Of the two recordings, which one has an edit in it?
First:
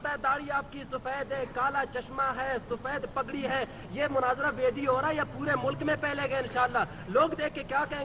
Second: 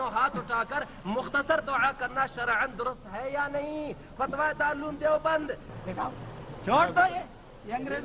second; 1 cut; at 5.7 s

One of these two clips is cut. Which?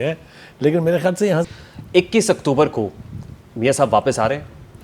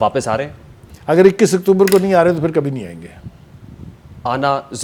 first; 1 cut; at 1.4 s

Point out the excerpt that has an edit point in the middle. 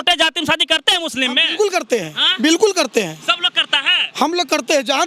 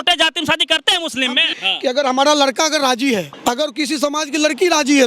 second; 2 cuts; at 1.5 s, 3.3 s

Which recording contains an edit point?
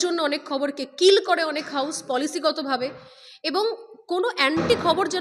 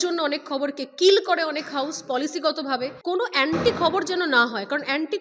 second; 1 cut; at 3.0 s

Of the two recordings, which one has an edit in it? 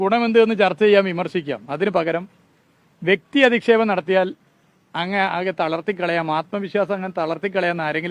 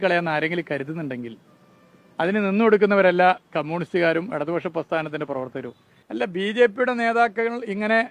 second; 1 cut; at 6.0 s

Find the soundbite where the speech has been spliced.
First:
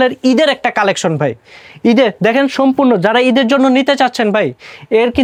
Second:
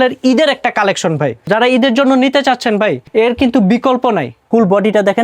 second; 3 cuts; at 1.5 s, 3.0 s, 4.3 s

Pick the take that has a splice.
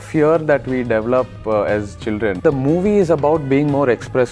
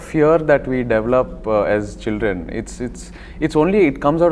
first; 1 cut; at 2.4 s

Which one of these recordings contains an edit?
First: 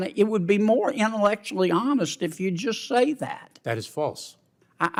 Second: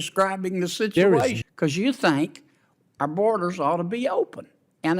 second; 1 cut; at 1.4 s

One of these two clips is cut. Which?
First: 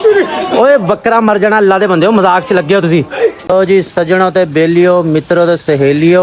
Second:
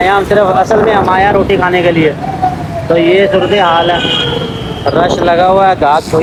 first; 1 cut; at 3.4 s

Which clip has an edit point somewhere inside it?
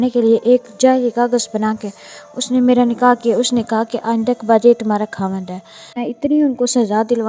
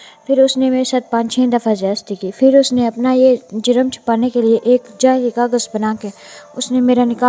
first; 1 cut; at 6.0 s

